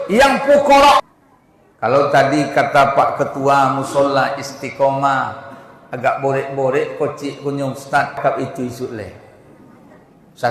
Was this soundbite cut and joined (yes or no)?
yes